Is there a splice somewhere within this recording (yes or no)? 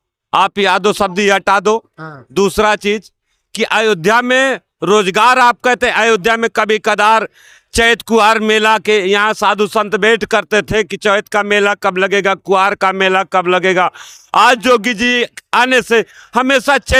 no